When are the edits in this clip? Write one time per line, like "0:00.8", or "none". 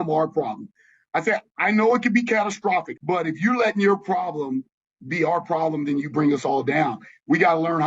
0:02.9